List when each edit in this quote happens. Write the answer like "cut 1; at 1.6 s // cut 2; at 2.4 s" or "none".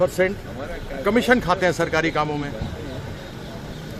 none